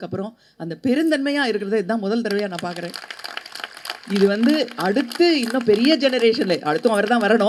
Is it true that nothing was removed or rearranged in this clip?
yes; 0 cuts

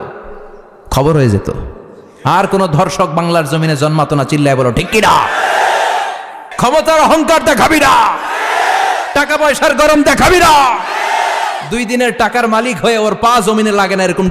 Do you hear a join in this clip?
yes; 1 cut; at 6.4 s

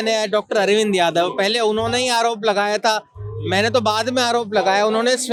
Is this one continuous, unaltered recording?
yes; 0 cuts

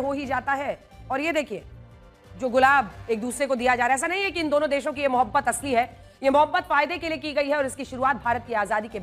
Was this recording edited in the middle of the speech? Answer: no; 0 cuts

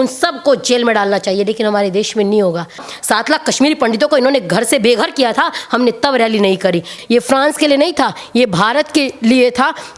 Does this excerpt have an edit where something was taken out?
yes; 2 cuts; at 2.9 s, 6.9 s

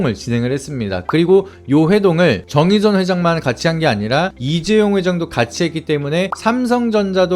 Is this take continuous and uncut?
no; 1 cut; at 1.0 s

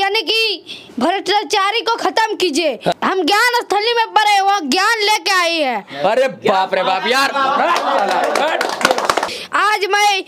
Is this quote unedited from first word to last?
no; 2 cuts; at 2.9 s, 9.3 s

